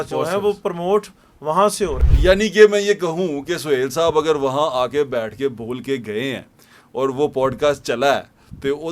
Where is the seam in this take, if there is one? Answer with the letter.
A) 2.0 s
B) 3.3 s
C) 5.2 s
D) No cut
A